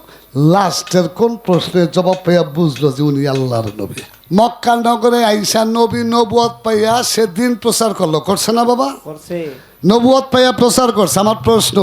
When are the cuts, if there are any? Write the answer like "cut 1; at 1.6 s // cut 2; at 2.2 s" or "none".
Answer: cut 1; at 4.0 s